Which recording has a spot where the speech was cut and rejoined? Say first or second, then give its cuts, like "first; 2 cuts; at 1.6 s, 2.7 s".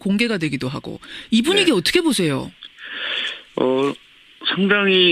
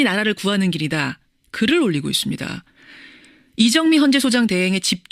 second; 1 cut; at 3.4 s